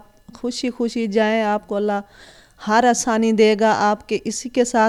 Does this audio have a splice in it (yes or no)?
no